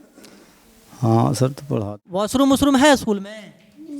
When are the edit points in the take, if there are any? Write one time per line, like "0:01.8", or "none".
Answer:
0:01.7